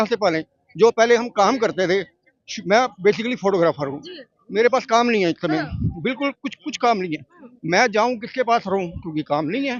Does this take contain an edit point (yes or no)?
no